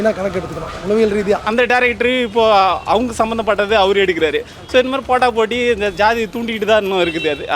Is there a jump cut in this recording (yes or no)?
yes